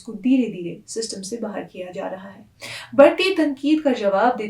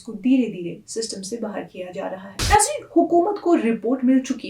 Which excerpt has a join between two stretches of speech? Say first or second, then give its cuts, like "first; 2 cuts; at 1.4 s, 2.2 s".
second; 1 cut; at 2.3 s